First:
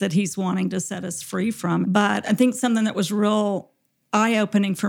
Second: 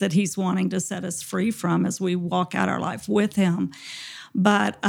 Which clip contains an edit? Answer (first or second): first